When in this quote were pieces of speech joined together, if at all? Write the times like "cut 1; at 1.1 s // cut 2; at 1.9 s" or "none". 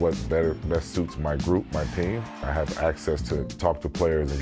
cut 1; at 2.6 s